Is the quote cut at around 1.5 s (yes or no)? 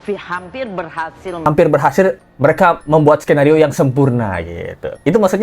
yes